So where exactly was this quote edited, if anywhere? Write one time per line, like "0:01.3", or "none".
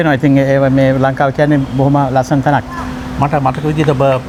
none